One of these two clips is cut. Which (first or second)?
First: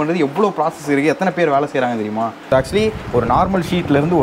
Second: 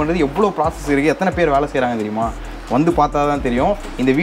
first